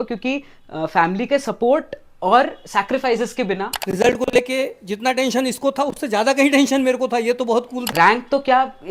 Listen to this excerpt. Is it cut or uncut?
cut